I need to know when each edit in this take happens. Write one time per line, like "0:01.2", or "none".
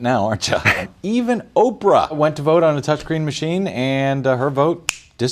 0:00.8
0:02.2